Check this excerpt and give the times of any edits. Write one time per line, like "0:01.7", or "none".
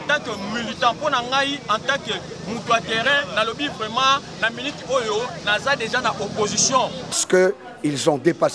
0:07.2